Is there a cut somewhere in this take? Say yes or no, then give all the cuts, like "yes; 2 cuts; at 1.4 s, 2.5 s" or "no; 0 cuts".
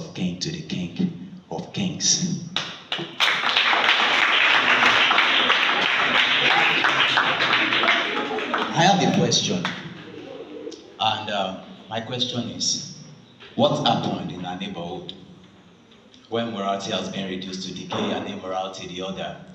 no; 0 cuts